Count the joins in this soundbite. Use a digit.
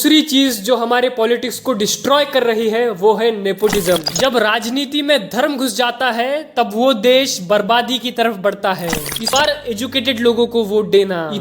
2